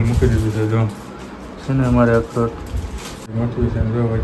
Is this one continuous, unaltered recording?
no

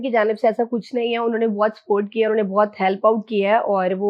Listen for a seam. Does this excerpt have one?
no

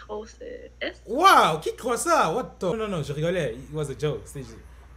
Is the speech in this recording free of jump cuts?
no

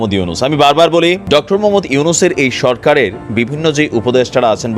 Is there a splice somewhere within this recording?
yes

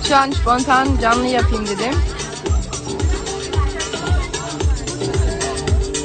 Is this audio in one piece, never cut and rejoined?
yes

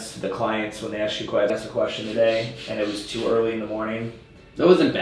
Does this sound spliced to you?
no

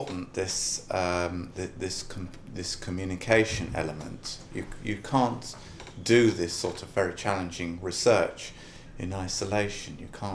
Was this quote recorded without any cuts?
yes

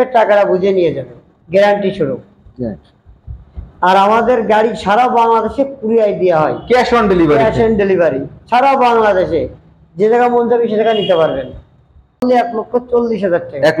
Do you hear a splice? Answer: yes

